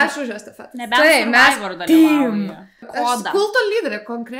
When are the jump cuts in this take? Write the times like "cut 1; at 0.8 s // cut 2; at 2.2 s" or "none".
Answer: cut 1; at 2.8 s